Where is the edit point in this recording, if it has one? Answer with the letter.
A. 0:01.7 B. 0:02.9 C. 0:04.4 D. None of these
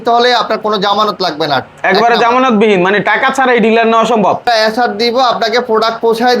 C